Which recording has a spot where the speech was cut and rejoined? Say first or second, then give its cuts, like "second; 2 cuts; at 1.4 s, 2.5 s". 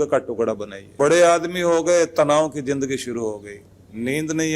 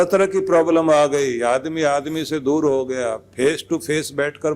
first; 1 cut; at 0.9 s